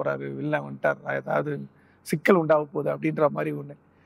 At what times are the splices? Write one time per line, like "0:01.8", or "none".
none